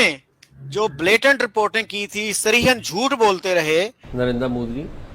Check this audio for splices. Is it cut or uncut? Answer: cut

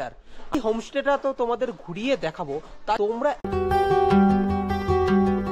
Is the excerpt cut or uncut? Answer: cut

